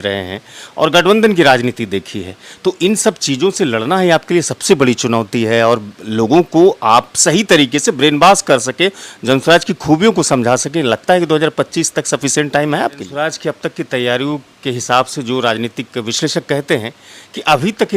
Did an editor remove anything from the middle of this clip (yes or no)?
yes